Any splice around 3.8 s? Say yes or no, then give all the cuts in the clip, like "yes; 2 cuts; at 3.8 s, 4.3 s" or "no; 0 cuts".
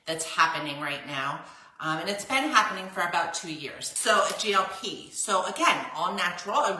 yes; 1 cut; at 3.8 s